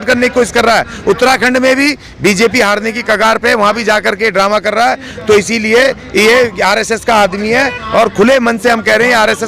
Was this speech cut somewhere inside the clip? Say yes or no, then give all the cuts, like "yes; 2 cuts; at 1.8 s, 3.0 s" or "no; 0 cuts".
no; 0 cuts